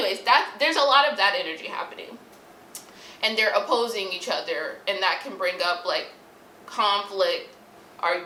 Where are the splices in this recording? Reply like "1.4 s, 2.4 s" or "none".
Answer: none